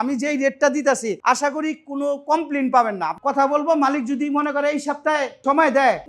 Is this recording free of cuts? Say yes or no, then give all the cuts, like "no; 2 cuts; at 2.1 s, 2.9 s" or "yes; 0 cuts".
no; 1 cut; at 3.2 s